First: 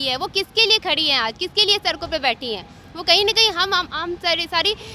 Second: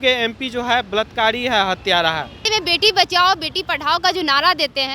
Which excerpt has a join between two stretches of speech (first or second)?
second